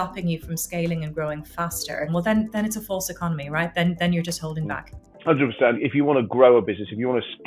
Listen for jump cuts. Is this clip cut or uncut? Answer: cut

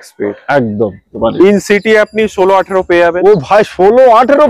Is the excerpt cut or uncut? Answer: cut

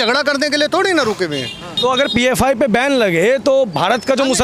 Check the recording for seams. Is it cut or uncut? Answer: cut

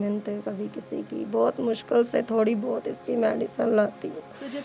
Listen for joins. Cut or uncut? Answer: uncut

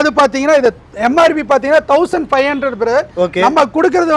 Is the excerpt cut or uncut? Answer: uncut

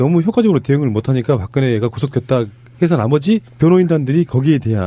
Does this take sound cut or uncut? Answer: cut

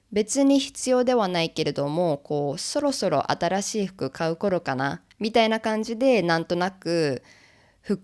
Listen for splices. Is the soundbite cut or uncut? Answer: uncut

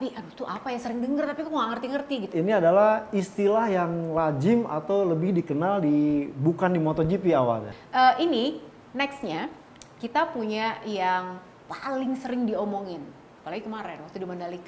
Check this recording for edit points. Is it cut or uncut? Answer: cut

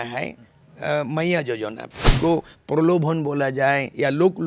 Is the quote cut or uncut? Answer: cut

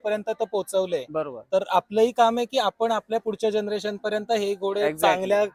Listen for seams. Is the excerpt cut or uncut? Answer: uncut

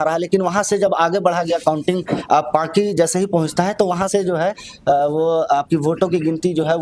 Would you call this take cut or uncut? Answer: uncut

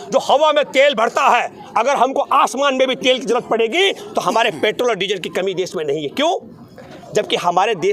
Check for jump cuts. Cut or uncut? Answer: uncut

